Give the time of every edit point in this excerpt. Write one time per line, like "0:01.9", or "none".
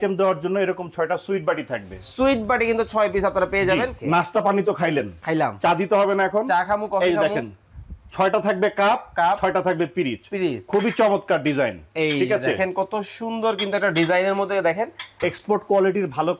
0:03.9
0:15.2